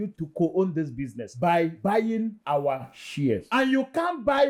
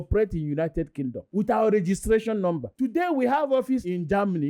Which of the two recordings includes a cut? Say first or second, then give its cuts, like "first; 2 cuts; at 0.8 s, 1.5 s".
second; 1 cut; at 2.7 s